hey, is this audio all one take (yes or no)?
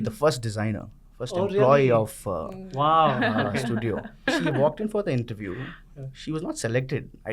no